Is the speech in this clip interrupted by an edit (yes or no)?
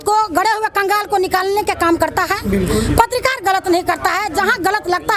no